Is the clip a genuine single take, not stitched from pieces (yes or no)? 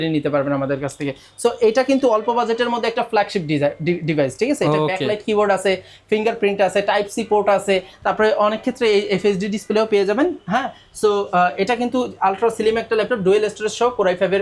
yes